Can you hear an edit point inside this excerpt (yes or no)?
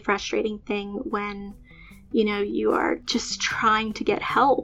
yes